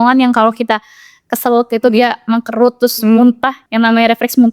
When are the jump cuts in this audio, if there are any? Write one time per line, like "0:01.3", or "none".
0:03.6